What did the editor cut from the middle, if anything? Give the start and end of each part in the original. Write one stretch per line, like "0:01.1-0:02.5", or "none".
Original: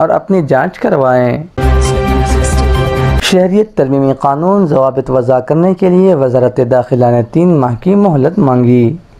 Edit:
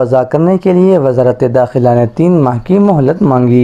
none